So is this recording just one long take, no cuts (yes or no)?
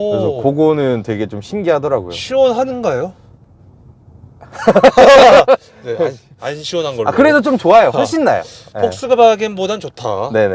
yes